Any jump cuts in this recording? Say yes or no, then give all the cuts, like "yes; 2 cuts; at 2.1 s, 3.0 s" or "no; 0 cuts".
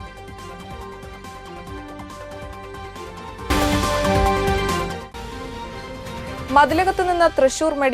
yes; 1 cut; at 1.5 s